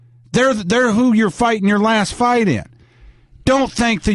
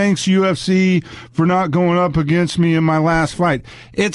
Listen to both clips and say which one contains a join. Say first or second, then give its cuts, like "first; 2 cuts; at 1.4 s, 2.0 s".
second; 1 cut; at 2.8 s